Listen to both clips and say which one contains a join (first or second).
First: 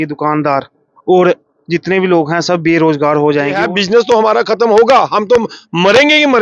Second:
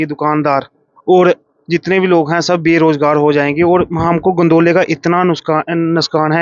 first